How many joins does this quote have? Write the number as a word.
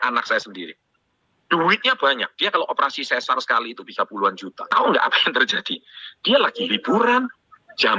one